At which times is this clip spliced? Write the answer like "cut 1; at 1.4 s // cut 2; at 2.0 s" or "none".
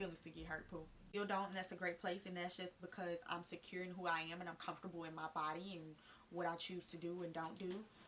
cut 1; at 1.1 s